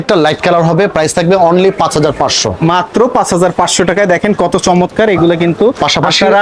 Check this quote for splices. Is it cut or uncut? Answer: uncut